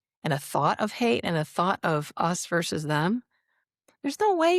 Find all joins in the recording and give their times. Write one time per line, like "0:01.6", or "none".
none